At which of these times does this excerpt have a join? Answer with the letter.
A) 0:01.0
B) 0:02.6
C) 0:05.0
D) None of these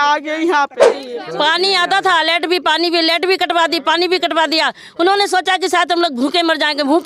A